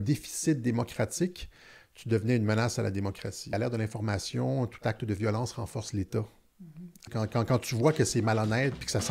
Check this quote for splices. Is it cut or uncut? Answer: cut